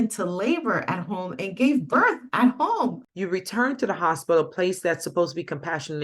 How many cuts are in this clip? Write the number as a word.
one